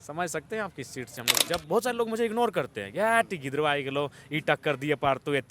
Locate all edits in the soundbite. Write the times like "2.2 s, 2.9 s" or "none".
1.4 s